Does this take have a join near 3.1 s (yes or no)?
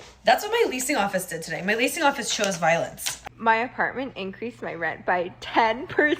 yes